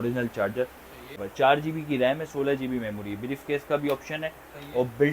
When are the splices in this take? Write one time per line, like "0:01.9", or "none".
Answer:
0:01.2